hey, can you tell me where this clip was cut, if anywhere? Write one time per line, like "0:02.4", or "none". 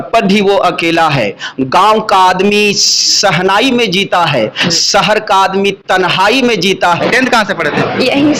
0:07.0